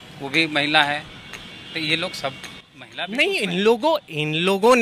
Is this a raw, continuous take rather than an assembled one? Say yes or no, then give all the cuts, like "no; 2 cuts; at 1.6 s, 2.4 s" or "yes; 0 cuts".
yes; 0 cuts